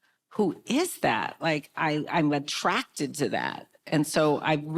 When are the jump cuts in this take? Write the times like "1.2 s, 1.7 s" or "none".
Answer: none